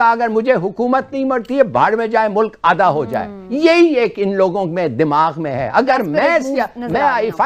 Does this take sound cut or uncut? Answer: uncut